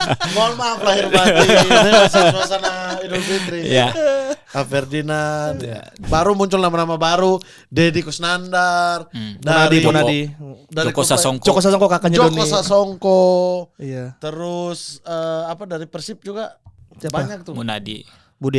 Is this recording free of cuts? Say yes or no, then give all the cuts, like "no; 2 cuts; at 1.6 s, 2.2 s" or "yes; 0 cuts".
no; 1 cut; at 6.0 s